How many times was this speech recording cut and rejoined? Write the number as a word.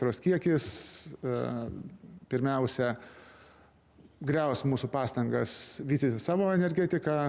zero